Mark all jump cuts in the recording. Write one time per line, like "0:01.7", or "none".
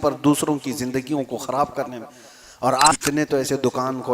0:02.9